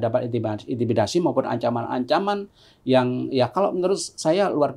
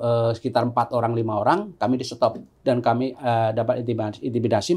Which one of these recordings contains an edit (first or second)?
second